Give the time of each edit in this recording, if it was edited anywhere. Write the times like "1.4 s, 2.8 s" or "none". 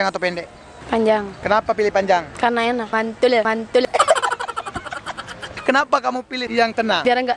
2.9 s, 3.8 s, 5.5 s, 6.4 s